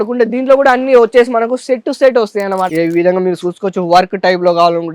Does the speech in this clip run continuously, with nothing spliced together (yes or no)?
no